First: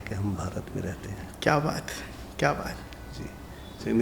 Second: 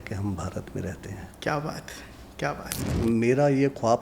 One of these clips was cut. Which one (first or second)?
second